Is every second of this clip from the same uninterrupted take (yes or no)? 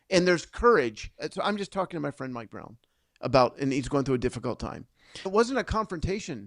no